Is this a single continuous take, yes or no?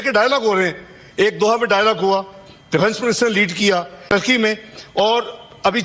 no